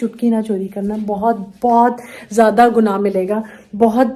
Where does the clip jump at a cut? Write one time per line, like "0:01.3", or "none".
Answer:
none